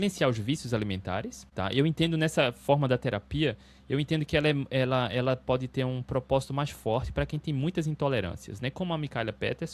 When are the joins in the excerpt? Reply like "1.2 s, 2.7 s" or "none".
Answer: 1.4 s

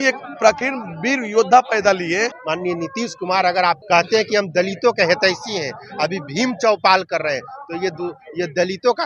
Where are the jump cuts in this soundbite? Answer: 2.4 s, 3.8 s

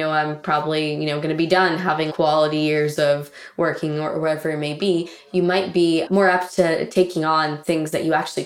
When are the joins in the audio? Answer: 2.1 s, 6.1 s

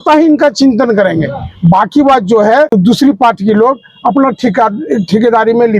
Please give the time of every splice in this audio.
2.7 s

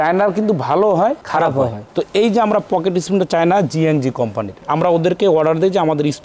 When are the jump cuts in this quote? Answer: none

